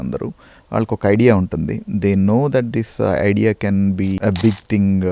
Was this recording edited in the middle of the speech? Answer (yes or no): yes